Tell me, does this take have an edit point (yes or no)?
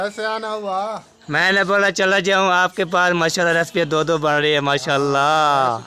no